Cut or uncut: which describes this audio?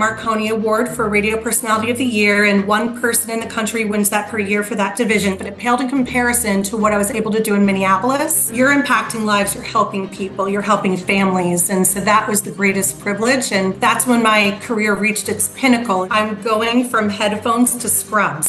cut